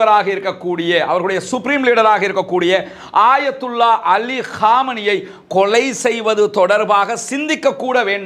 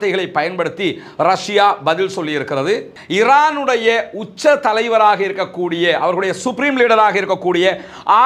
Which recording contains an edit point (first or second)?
second